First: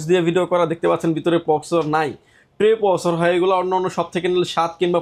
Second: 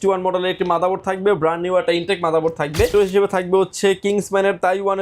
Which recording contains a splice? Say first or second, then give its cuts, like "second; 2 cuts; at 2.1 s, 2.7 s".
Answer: second; 1 cut; at 2.9 s